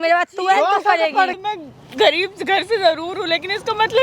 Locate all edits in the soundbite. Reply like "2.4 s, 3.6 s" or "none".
1.4 s